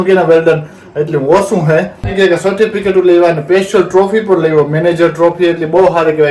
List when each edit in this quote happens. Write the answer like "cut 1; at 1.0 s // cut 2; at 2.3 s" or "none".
cut 1; at 2.1 s